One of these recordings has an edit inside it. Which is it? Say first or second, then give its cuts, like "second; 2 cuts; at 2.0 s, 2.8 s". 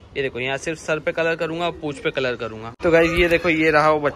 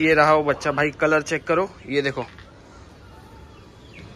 first; 1 cut; at 2.7 s